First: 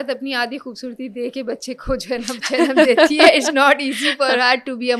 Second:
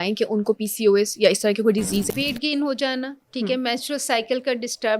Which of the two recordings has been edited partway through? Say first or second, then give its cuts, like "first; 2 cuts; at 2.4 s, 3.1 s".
second; 1 cut; at 2.1 s